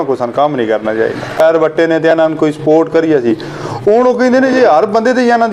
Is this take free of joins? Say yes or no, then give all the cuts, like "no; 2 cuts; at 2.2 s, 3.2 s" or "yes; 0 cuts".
no; 1 cut; at 1.4 s